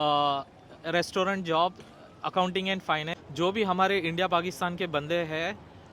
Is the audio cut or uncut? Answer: cut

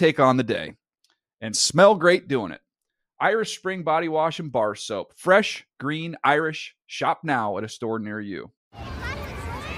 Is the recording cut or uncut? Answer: cut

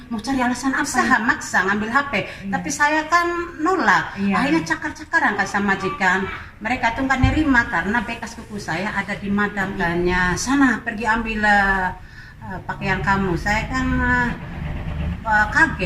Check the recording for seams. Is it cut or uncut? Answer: cut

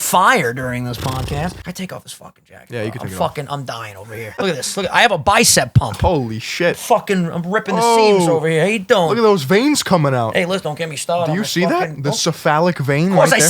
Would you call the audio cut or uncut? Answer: cut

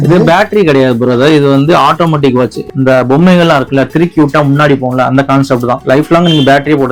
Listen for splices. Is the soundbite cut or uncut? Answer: cut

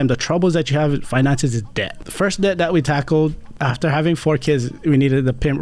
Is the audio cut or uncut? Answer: cut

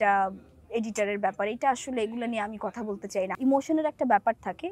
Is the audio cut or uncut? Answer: cut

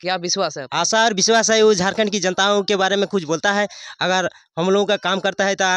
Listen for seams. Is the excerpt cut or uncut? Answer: uncut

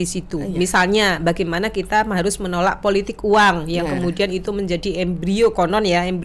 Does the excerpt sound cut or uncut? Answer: uncut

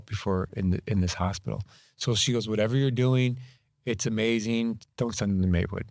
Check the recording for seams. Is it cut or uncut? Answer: cut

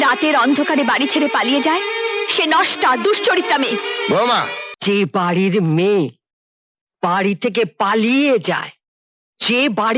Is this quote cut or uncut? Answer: cut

